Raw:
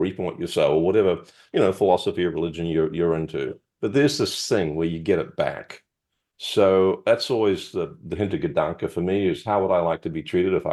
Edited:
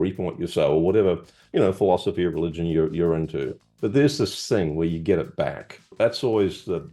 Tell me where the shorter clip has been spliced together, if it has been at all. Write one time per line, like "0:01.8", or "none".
0:05.9